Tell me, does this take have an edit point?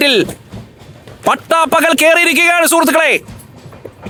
no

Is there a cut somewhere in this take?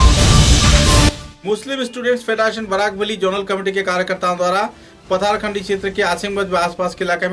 yes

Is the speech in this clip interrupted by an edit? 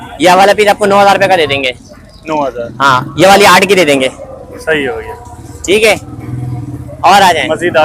no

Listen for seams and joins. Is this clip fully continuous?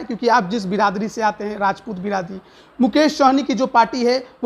yes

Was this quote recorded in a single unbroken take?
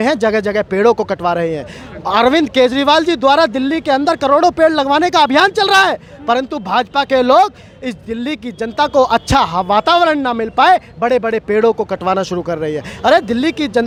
yes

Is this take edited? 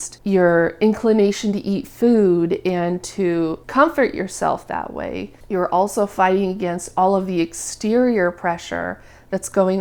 no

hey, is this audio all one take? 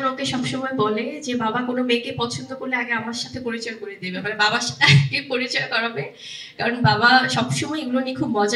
yes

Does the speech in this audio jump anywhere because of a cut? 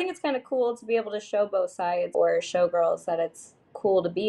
yes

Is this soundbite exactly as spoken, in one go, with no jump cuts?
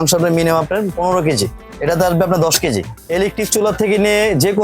no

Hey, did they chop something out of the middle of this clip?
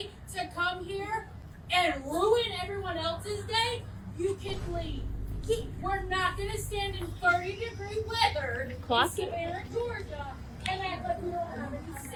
no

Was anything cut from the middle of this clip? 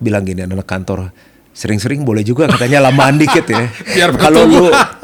no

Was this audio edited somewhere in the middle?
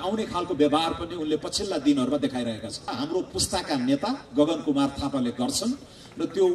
yes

